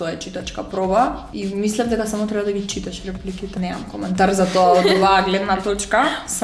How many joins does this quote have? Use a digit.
2